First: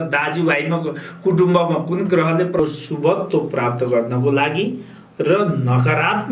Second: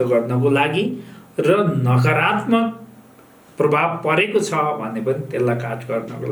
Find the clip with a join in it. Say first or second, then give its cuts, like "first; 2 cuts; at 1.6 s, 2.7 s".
first; 1 cut; at 2.6 s